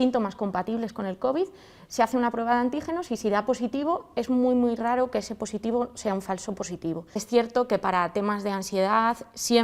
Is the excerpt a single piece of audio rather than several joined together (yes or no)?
no